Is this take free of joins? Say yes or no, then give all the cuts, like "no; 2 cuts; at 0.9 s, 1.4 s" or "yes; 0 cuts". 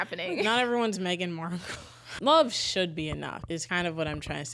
no; 2 cuts; at 2.1 s, 3.5 s